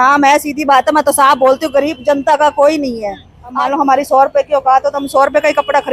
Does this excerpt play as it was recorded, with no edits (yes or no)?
no